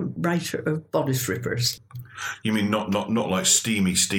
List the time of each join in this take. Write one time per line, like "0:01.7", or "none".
none